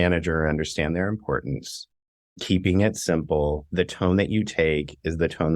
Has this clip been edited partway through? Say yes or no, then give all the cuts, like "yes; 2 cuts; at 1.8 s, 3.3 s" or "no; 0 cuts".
yes; 1 cut; at 3.7 s